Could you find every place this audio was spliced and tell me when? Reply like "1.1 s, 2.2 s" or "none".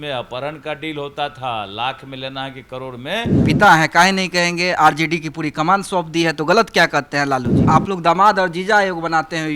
3.4 s, 7.6 s